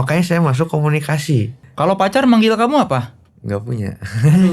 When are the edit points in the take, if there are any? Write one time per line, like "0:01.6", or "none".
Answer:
0:01.6